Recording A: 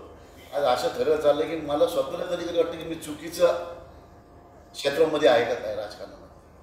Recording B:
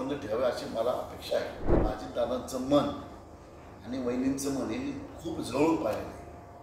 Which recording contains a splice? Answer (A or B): B